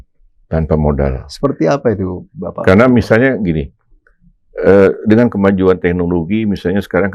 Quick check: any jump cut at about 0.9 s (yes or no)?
no